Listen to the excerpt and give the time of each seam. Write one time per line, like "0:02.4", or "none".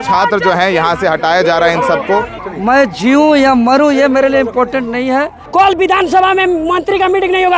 0:02.4
0:05.4